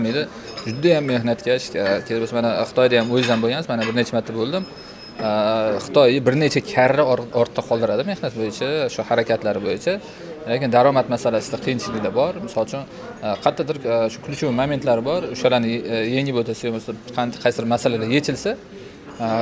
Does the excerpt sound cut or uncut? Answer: uncut